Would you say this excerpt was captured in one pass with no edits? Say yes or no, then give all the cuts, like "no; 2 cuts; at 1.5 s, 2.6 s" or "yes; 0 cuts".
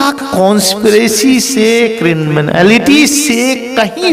yes; 0 cuts